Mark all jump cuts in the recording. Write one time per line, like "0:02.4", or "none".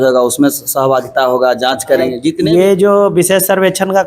0:02.4